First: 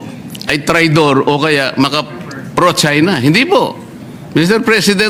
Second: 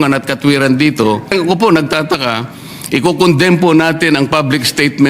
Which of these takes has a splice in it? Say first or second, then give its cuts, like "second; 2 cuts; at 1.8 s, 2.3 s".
second; 1 cut; at 1.3 s